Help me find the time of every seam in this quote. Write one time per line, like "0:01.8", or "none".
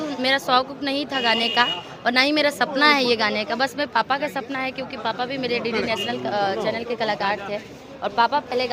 none